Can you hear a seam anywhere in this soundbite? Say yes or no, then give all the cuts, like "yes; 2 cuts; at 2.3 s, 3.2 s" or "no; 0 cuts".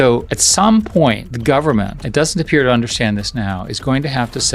yes; 1 cut; at 2.0 s